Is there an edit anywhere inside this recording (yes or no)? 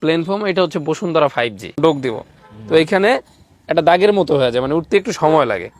yes